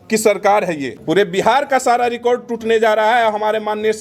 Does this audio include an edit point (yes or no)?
yes